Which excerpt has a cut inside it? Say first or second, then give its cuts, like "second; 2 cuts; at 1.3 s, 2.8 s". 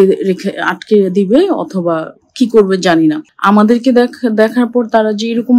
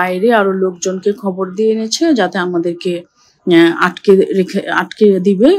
first; 1 cut; at 3.3 s